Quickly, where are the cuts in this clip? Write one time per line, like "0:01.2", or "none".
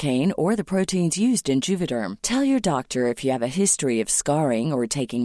none